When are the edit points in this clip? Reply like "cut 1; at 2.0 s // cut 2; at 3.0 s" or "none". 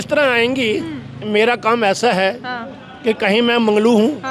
cut 1; at 1.1 s